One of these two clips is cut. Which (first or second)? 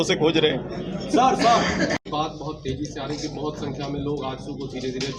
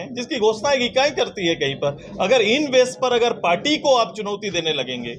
first